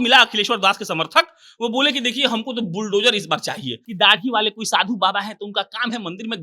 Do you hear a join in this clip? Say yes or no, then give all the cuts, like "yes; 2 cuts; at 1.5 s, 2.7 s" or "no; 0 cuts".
yes; 1 cut; at 3.8 s